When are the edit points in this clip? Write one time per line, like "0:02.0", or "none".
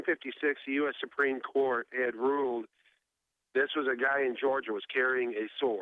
0:01.3